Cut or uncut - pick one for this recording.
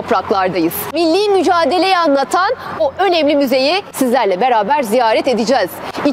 cut